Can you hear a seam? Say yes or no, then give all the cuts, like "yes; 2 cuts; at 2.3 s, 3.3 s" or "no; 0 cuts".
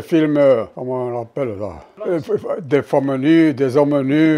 no; 0 cuts